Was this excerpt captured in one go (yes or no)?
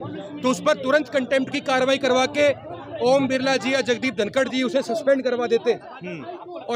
yes